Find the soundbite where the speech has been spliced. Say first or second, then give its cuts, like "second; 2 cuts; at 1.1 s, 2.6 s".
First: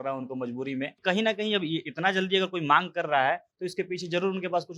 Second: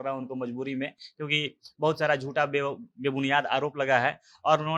first; 1 cut; at 1.0 s